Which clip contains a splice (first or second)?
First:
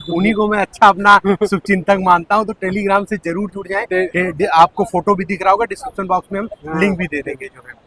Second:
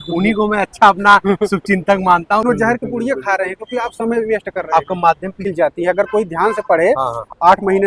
second